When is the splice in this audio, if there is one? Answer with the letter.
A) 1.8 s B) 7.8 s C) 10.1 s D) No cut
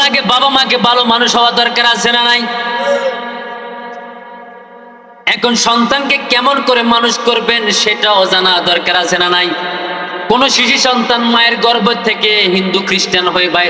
C